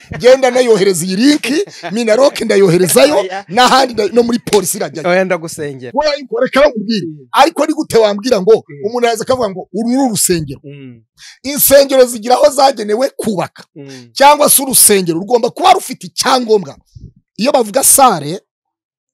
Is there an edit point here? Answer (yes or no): no